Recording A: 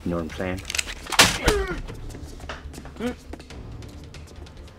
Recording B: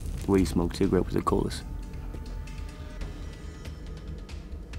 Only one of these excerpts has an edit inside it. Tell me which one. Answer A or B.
A